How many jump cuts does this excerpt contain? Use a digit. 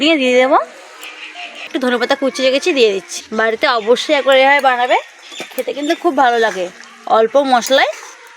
2